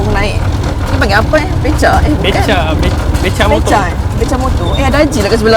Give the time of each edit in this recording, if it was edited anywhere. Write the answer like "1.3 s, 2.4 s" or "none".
none